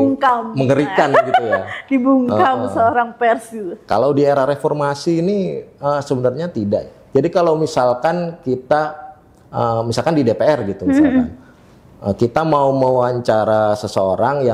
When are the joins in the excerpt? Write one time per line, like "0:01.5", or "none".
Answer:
none